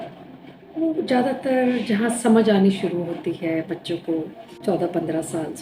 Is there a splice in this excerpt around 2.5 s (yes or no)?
no